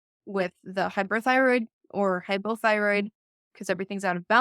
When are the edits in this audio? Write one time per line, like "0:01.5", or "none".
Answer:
0:03.5